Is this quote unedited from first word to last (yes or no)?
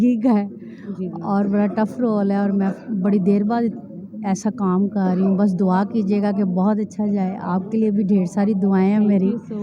yes